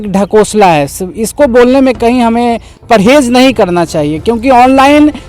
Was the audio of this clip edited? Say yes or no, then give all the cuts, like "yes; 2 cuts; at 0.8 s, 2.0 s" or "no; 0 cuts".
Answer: no; 0 cuts